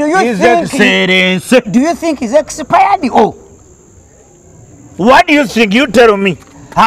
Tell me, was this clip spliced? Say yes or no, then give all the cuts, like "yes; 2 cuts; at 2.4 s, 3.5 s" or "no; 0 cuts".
no; 0 cuts